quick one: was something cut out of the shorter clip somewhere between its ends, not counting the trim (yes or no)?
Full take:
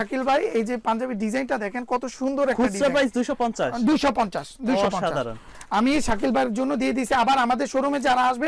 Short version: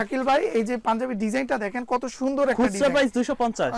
no